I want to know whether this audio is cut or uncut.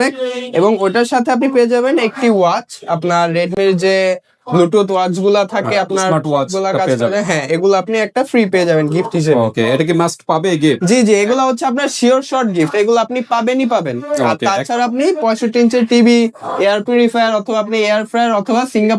uncut